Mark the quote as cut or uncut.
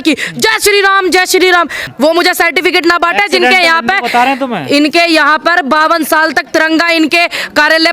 cut